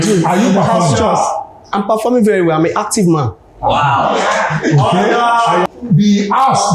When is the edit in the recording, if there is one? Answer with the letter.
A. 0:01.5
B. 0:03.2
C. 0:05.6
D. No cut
C